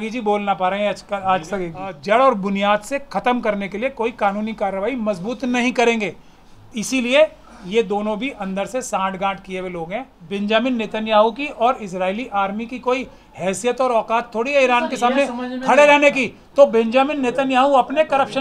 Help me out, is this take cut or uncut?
cut